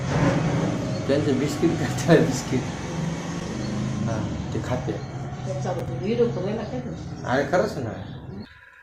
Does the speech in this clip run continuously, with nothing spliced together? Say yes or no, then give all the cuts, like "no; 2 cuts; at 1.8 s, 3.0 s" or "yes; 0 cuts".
yes; 0 cuts